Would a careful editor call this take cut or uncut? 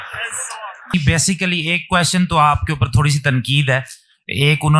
cut